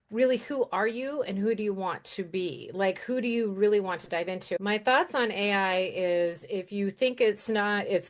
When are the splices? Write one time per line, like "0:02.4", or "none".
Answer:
0:04.6

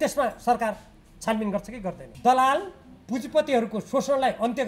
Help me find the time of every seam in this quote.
0:02.1

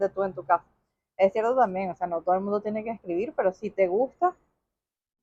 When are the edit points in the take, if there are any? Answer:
none

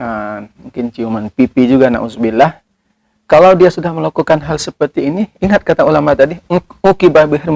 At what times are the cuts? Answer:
none

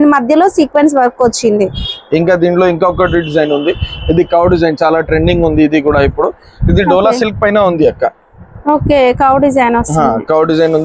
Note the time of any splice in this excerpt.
none

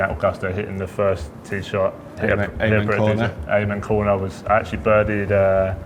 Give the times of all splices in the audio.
none

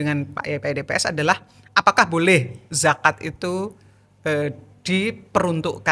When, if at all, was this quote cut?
none

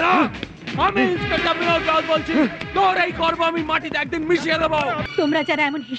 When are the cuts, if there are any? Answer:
0:05.0

